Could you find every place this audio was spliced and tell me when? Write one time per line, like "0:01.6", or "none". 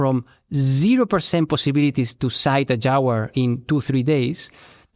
none